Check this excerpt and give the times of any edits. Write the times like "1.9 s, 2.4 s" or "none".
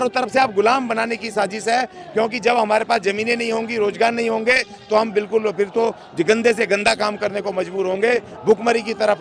none